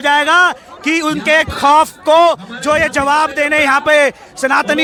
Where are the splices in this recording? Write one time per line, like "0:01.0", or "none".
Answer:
none